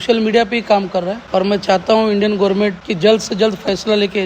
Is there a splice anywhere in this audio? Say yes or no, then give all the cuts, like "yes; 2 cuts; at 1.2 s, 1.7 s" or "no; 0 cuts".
yes; 2 cuts; at 1.2 s, 2.8 s